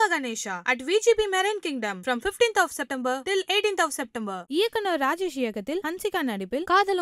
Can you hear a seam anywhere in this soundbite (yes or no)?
no